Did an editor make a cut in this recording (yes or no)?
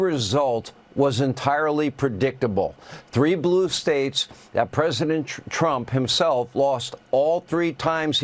no